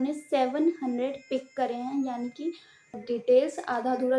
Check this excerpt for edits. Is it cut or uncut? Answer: cut